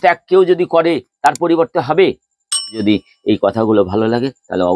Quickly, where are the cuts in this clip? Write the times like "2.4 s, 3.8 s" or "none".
2.8 s

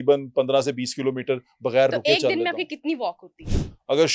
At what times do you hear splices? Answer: none

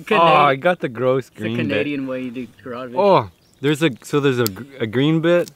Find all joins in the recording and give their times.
none

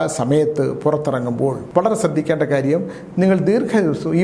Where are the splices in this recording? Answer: 1.6 s

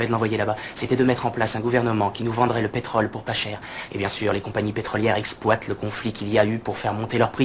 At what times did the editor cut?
2.9 s

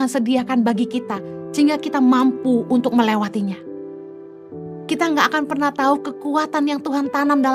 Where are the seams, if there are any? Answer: none

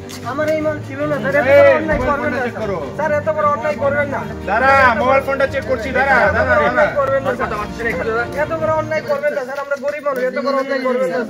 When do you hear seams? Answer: none

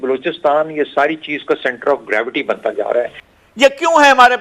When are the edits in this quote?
3.2 s

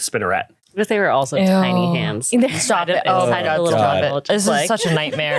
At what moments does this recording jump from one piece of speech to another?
none

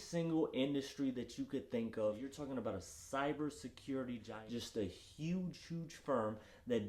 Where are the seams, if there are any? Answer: 2.3 s, 4.3 s

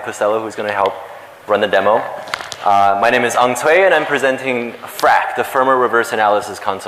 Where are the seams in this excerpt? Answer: none

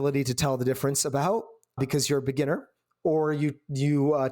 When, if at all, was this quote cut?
1.8 s

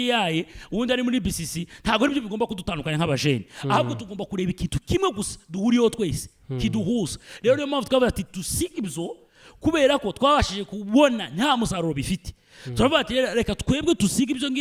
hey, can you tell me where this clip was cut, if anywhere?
none

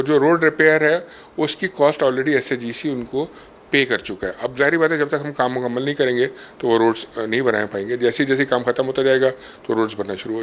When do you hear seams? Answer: none

